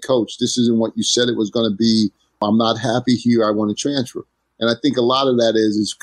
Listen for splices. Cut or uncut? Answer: cut